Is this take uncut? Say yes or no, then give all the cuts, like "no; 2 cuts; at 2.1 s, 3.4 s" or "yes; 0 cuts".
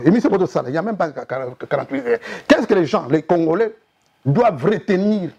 yes; 0 cuts